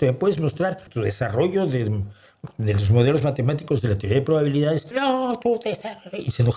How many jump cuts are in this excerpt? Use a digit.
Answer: 2